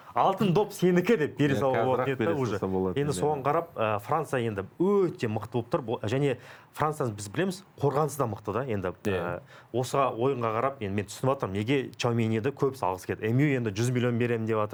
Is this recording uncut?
yes; 0 cuts

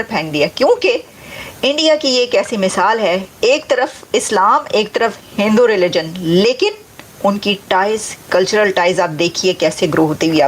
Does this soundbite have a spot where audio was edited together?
yes; 1 cut; at 3.3 s

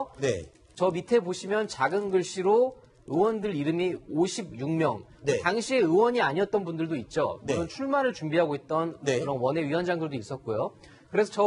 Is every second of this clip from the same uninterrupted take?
yes; 0 cuts

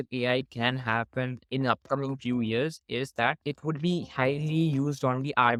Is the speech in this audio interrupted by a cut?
no; 0 cuts

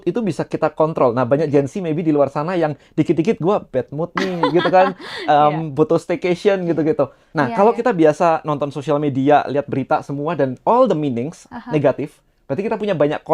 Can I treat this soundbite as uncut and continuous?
no; 1 cut; at 7.3 s

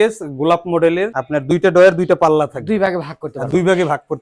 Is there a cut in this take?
no; 0 cuts

